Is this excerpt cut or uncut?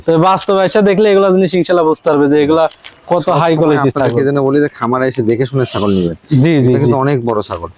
uncut